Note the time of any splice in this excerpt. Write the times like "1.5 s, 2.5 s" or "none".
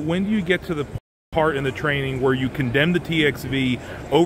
1.0 s